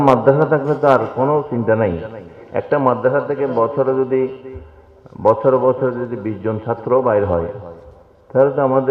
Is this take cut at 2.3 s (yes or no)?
no